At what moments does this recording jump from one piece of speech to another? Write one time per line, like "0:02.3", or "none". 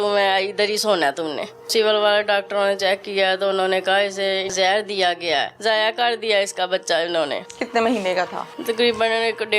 0:01.7
0:04.5
0:05.5
0:07.5
0:08.5